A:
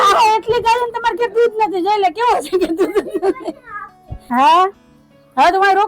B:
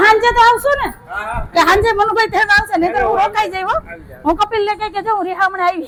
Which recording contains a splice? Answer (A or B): A